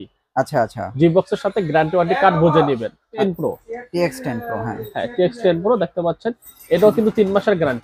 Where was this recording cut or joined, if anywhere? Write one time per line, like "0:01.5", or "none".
0:03.2